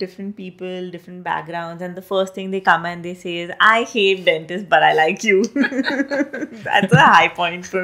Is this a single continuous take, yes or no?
yes